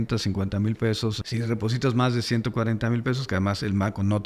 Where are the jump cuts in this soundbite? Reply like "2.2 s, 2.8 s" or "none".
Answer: none

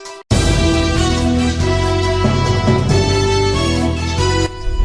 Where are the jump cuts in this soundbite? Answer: none

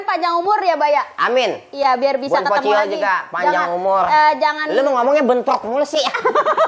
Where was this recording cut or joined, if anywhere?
none

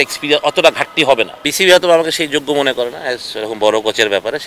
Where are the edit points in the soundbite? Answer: 1.4 s

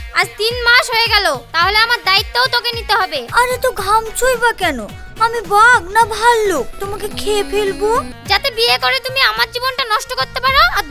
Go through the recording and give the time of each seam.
3.2 s, 8.2 s

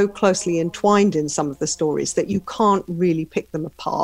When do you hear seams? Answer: none

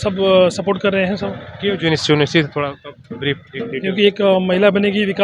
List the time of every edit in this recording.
none

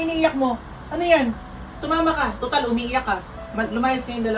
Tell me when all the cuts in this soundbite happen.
1.8 s

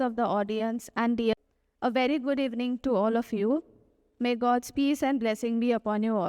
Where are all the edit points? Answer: 1.3 s

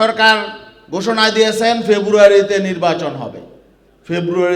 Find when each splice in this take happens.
none

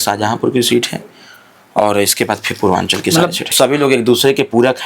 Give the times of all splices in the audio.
3.4 s

